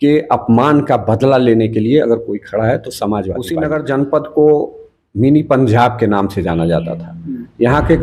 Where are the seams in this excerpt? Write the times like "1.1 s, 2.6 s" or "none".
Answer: 3.5 s